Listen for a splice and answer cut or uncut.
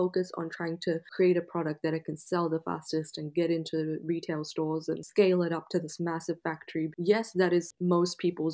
cut